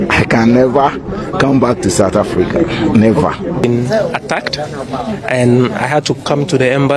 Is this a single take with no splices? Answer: no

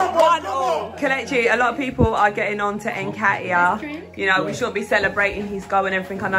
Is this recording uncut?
no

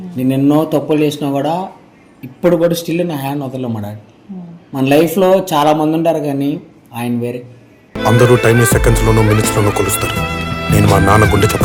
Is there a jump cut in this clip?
no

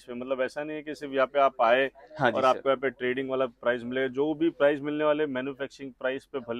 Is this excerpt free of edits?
yes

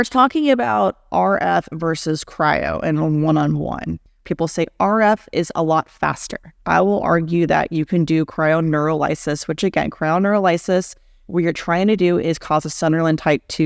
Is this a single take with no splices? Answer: no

